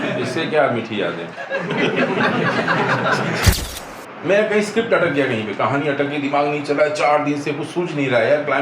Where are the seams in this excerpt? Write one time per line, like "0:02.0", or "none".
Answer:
0:03.5